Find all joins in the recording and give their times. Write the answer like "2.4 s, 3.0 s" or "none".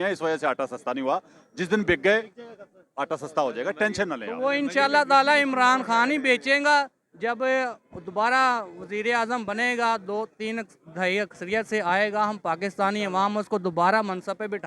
none